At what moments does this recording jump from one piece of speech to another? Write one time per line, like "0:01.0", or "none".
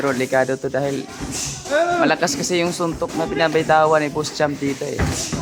none